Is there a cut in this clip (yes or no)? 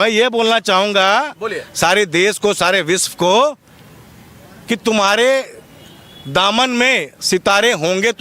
no